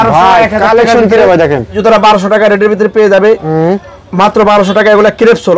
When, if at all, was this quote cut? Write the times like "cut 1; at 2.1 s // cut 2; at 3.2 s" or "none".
cut 1; at 1.8 s